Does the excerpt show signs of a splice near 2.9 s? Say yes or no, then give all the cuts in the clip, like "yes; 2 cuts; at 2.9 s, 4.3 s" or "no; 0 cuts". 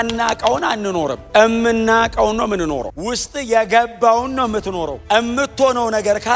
yes; 3 cuts; at 1.2 s, 2.9 s, 5.0 s